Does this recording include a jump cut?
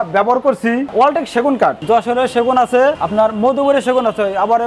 yes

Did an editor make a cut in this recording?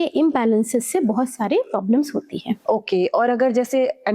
no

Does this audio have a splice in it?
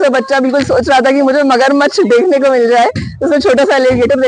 no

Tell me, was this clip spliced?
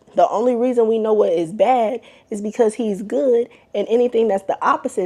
no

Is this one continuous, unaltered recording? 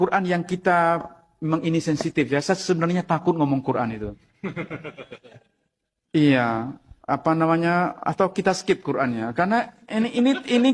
yes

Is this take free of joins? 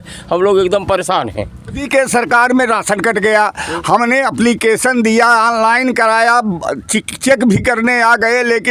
no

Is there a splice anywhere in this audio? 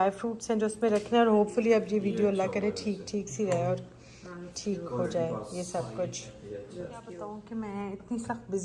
no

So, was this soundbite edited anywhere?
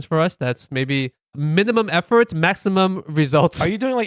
yes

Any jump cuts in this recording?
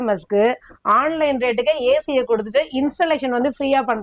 no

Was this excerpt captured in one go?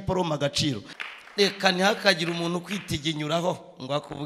no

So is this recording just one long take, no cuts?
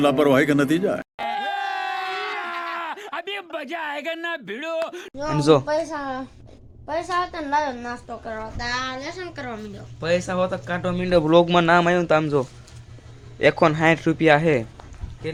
yes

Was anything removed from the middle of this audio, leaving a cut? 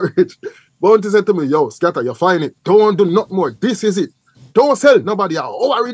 yes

